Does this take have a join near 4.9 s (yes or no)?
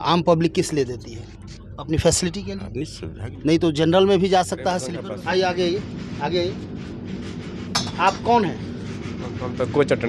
yes